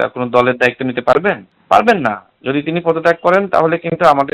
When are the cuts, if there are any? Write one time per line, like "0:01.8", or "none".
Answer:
none